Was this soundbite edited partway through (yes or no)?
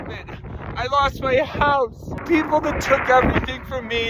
yes